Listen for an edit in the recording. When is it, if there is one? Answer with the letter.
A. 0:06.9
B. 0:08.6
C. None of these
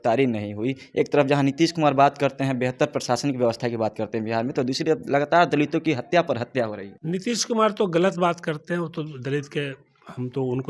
A